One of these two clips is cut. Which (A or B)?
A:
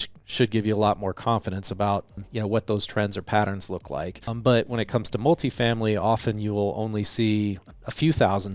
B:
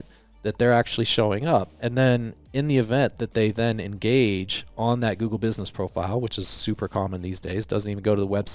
A